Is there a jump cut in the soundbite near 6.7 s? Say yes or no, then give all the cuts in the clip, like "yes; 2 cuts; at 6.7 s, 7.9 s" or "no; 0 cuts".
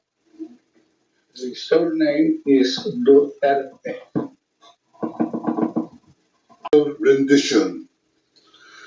yes; 1 cut; at 6.7 s